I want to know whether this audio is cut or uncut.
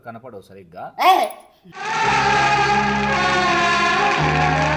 cut